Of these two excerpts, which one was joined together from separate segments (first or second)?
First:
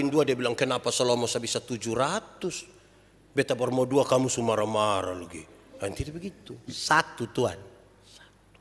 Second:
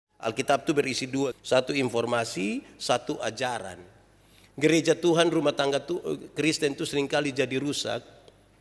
second